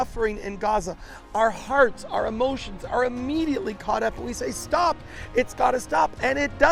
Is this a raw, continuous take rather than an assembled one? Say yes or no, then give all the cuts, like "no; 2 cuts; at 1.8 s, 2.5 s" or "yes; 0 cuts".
yes; 0 cuts